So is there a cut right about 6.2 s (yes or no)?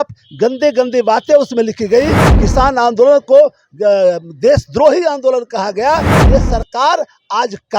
yes